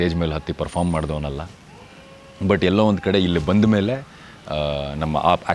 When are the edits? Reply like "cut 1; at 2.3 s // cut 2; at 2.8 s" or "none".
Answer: none

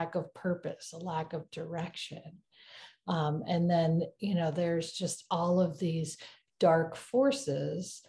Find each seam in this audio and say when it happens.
none

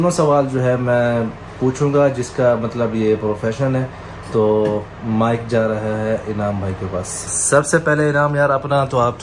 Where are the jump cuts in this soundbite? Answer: none

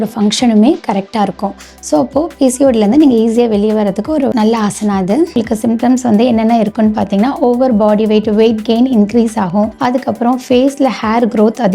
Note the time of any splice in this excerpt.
cut 1; at 5.4 s // cut 2; at 9.7 s

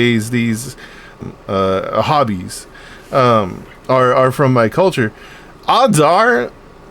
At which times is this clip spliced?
cut 1; at 1.2 s

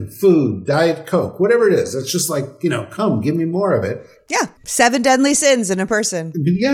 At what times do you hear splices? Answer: cut 1; at 4.5 s

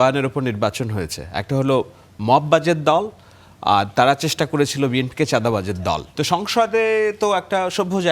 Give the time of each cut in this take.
cut 1; at 6.1 s

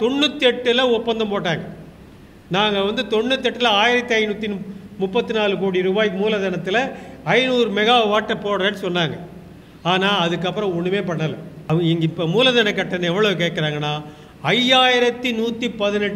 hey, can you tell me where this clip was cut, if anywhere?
cut 1; at 11.6 s

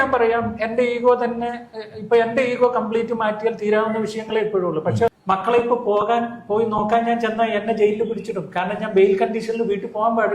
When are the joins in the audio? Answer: cut 1; at 5.1 s

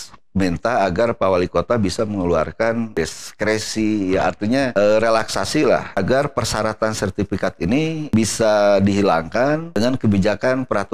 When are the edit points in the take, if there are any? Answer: cut 1; at 2.9 s // cut 2; at 4.7 s // cut 3; at 5.9 s // cut 4; at 8.1 s // cut 5; at 9.7 s

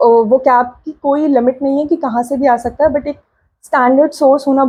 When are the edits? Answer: none

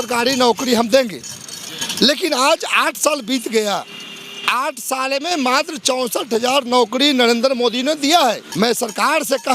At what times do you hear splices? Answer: cut 1; at 8.5 s

